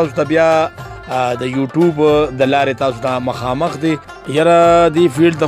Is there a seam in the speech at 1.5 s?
no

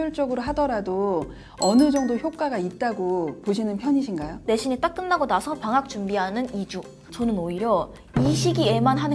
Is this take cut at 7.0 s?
yes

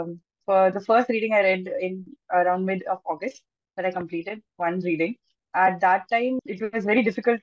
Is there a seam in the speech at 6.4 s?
yes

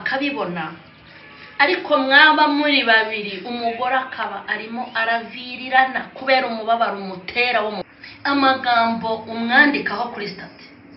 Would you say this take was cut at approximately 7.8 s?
yes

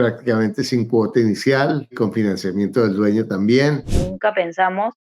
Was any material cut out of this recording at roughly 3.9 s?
yes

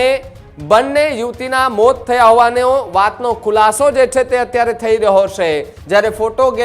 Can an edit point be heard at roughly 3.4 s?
no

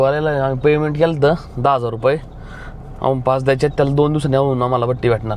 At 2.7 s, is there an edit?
no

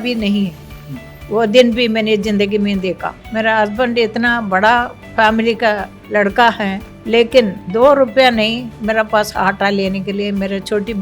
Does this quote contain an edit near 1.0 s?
no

